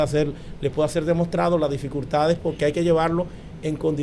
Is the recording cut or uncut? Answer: uncut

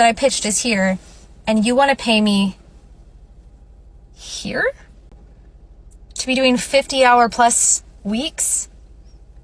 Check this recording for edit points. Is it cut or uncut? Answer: uncut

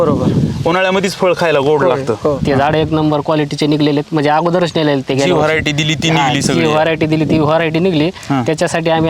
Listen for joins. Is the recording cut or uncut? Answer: cut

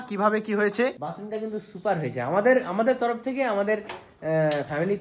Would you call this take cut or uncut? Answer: cut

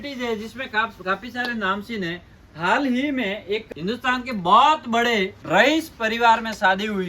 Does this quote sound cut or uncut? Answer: cut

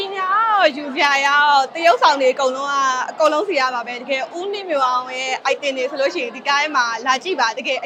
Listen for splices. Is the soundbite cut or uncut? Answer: uncut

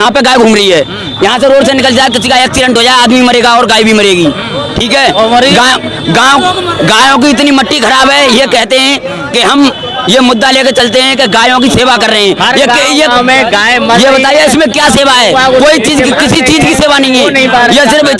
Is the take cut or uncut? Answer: uncut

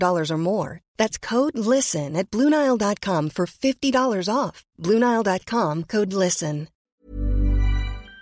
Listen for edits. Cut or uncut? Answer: cut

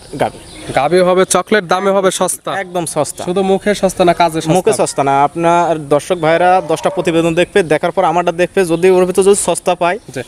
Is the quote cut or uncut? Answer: uncut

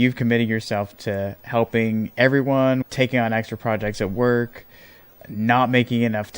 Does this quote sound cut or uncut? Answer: cut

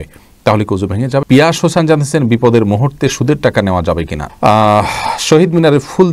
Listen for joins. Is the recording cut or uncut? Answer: cut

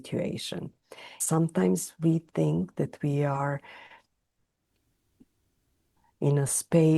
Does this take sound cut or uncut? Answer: cut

